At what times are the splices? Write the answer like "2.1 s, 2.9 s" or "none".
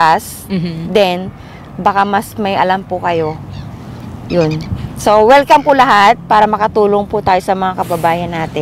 none